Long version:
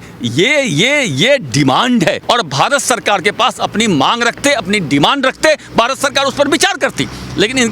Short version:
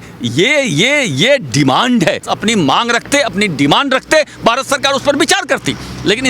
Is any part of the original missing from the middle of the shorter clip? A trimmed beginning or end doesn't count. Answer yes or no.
yes